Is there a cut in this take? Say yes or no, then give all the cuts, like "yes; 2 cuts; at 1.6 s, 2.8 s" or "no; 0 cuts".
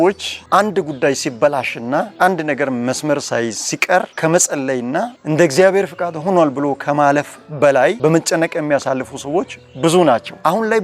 yes; 1 cut; at 2.1 s